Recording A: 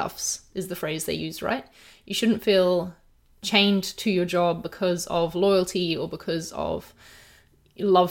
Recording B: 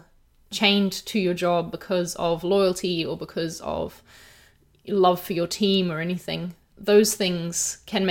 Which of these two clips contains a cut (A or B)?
B